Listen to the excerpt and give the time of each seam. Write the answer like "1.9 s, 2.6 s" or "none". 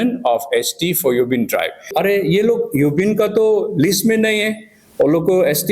1.9 s